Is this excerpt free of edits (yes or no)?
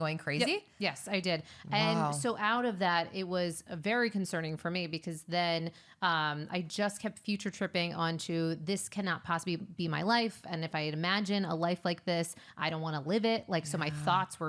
yes